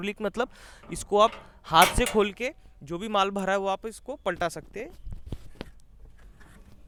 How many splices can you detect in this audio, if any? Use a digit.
0